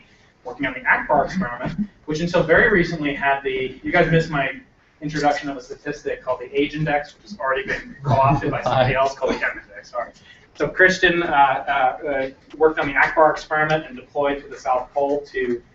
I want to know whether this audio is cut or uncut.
cut